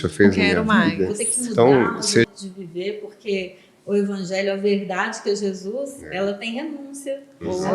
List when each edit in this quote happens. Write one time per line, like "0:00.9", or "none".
0:02.3